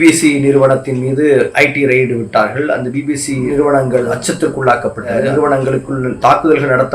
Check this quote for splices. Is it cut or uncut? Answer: cut